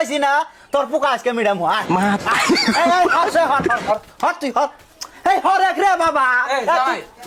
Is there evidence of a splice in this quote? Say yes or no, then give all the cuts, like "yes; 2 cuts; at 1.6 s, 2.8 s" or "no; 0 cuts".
no; 0 cuts